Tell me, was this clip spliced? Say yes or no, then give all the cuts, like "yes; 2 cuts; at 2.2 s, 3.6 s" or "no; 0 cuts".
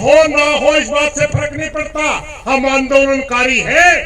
no; 0 cuts